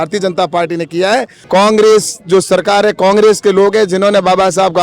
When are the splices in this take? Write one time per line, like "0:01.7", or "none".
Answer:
0:01.4